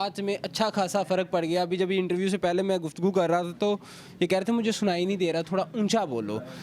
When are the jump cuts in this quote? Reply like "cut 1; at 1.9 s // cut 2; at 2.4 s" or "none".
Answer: none